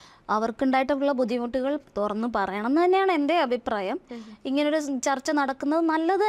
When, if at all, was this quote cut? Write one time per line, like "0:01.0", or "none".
none